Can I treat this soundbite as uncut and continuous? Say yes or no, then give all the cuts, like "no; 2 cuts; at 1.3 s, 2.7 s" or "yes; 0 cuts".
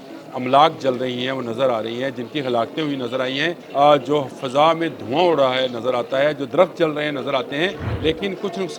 no; 2 cuts; at 3.6 s, 7.9 s